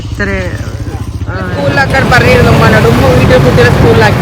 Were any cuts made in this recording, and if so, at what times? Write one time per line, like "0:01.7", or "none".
0:01.6